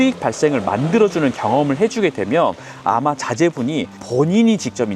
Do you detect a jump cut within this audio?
yes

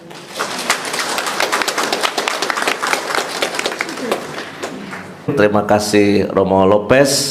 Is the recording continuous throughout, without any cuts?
no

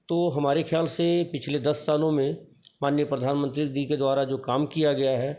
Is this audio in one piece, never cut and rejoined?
yes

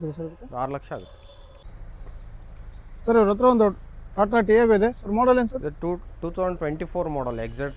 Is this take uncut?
yes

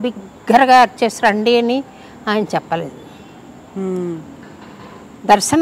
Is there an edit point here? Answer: no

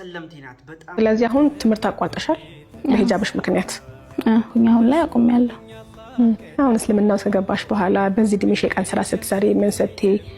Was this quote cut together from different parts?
yes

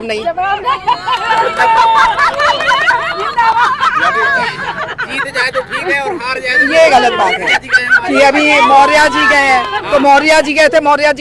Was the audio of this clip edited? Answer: no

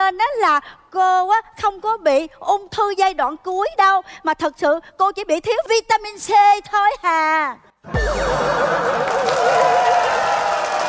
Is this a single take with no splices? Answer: yes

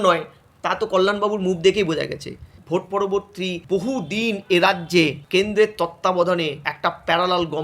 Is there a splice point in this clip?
yes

